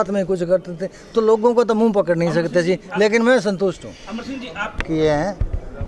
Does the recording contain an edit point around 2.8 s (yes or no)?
no